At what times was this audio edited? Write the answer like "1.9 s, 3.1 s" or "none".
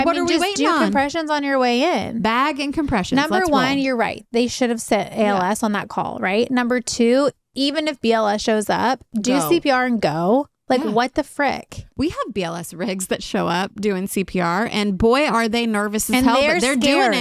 none